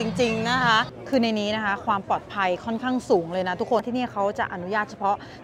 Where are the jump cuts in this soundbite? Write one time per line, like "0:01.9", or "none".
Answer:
0:01.0
0:03.8